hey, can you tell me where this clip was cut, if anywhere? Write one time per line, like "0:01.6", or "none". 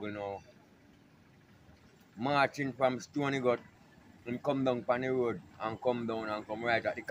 none